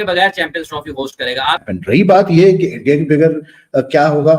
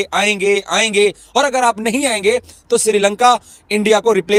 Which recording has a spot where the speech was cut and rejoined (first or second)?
first